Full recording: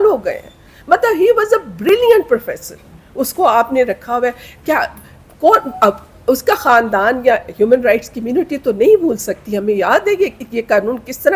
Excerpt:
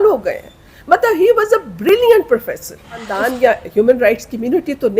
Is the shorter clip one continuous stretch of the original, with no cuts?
no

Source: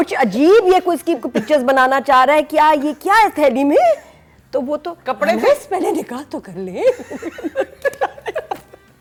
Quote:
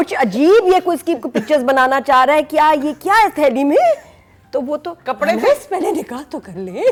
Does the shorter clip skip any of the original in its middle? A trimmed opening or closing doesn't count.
no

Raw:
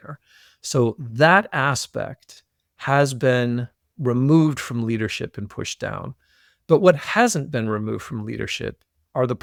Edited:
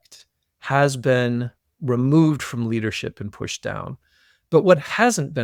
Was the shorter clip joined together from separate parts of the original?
no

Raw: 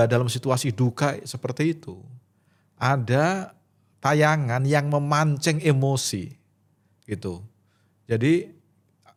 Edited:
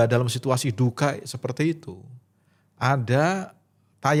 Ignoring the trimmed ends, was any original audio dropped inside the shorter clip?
no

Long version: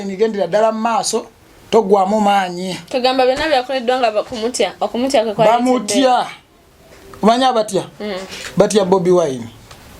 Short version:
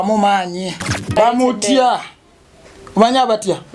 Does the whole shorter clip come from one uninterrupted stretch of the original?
no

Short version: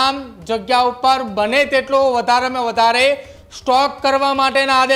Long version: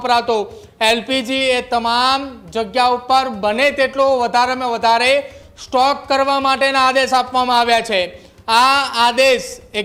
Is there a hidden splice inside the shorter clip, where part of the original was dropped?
no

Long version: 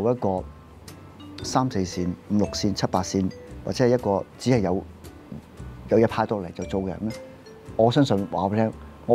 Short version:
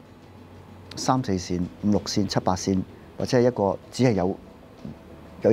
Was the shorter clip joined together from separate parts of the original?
no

